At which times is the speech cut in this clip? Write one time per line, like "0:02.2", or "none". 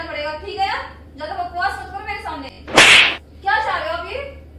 0:02.5
0:03.1